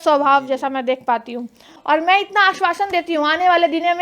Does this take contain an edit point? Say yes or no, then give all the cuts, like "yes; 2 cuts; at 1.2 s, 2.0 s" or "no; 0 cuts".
yes; 1 cut; at 1.7 s